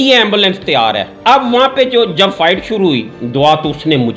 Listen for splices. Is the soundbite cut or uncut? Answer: uncut